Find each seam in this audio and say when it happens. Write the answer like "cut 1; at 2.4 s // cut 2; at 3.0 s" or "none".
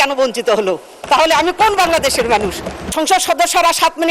cut 1; at 2.9 s